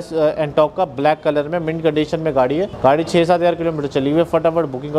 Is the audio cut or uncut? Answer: cut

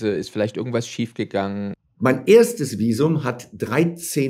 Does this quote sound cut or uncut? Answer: cut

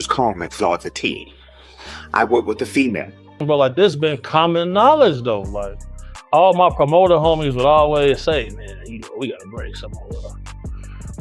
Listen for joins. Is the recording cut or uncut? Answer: cut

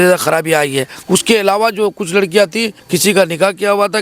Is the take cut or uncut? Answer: cut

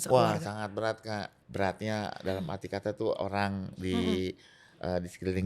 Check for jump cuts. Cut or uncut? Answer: cut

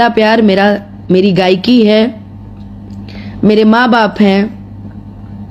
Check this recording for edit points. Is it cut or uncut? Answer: uncut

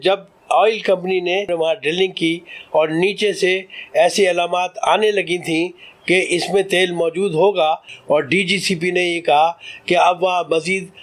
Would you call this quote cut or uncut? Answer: cut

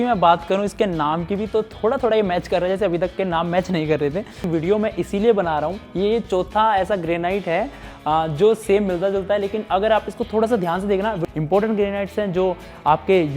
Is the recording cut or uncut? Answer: cut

